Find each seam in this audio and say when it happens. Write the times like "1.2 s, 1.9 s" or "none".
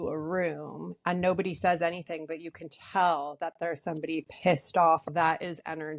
5.0 s